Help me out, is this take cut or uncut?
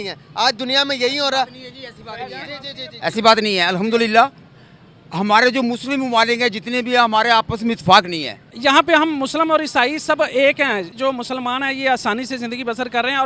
cut